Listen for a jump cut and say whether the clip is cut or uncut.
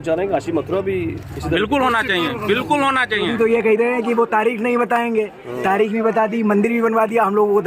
cut